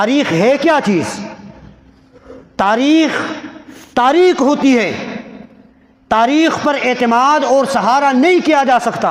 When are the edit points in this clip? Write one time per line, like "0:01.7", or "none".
none